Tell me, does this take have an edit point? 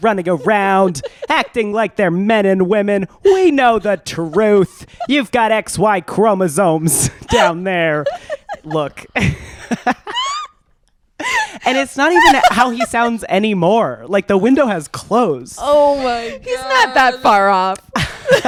no; 0 cuts

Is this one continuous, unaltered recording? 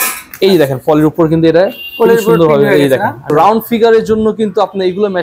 no; 1 cut; at 3.3 s

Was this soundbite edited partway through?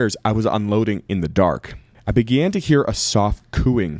no; 0 cuts

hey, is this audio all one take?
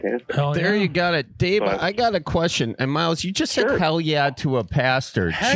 yes; 0 cuts

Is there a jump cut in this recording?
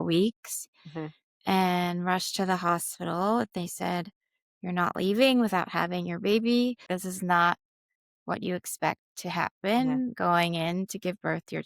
yes; 1 cut; at 6.8 s

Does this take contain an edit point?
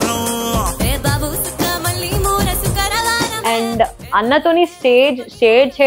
yes; 1 cut; at 3.4 s

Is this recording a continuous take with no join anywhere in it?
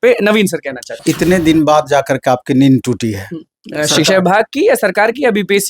no; 1 cut; at 1.0 s

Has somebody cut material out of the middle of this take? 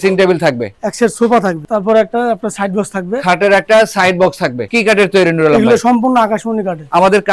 yes; 2 cuts; at 1.6 s, 4.6 s

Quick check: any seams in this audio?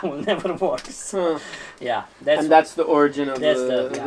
no; 0 cuts

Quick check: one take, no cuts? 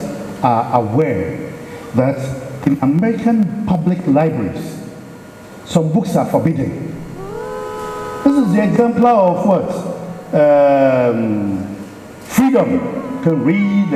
yes; 0 cuts

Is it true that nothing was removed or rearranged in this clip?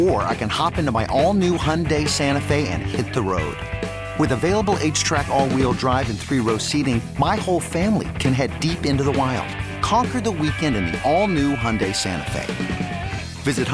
yes; 0 cuts

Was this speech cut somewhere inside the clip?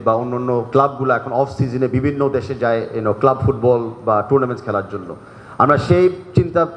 no; 0 cuts

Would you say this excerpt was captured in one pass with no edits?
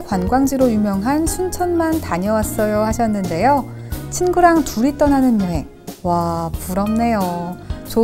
yes; 0 cuts

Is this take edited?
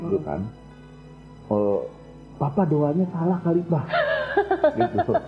no; 0 cuts

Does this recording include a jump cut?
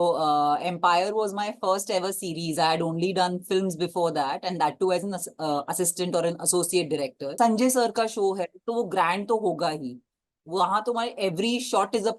yes; 1 cut; at 7.2 s

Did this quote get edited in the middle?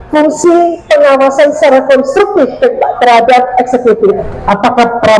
yes; 1 cut; at 4.3 s

